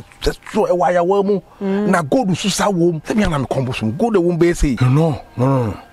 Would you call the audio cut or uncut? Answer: cut